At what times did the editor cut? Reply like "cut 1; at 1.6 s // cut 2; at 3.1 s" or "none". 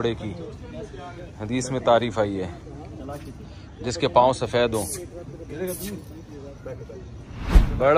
none